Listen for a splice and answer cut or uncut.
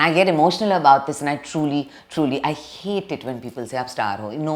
uncut